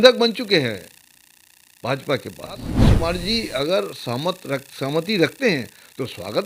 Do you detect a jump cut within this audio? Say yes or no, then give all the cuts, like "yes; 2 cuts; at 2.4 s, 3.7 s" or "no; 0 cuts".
yes; 1 cut; at 2.8 s